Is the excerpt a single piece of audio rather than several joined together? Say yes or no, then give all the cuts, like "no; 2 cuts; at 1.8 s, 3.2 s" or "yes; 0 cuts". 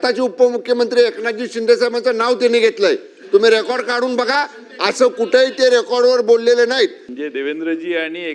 no; 1 cut; at 7.1 s